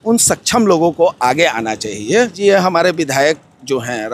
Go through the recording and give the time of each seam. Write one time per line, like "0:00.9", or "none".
0:02.3

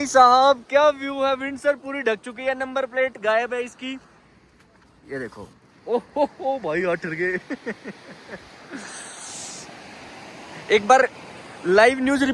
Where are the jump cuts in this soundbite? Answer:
none

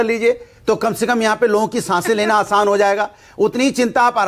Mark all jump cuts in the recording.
0:03.3

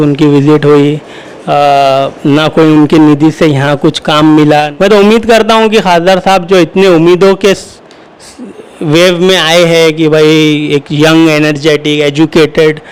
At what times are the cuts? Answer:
0:04.7

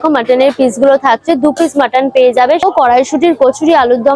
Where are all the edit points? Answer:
0:02.7

